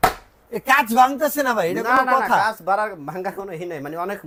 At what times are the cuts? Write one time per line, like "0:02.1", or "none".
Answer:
none